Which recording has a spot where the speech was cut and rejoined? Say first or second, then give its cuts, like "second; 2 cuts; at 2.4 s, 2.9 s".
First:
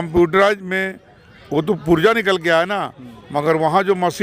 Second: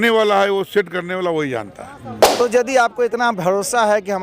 second; 1 cut; at 2.3 s